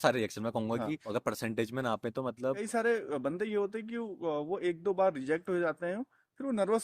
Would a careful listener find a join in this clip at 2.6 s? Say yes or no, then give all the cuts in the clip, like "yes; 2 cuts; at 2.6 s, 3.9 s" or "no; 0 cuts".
yes; 2 cuts; at 1.0 s, 2.6 s